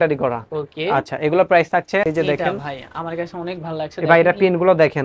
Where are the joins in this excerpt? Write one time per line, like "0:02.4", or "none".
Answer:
0:02.0